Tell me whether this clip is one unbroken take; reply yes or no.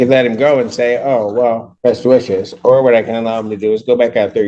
no